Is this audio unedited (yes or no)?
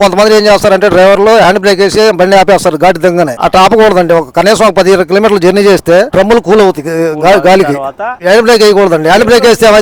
yes